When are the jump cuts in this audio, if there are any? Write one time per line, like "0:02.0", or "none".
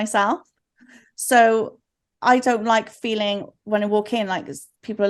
none